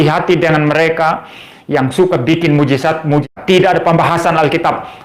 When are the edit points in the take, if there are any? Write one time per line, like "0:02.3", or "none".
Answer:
none